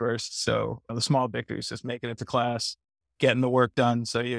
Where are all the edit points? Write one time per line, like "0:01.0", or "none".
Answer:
none